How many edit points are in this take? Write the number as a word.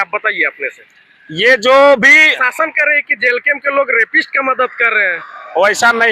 one